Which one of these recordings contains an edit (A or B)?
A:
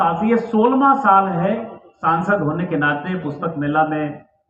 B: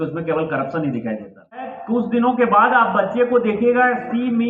B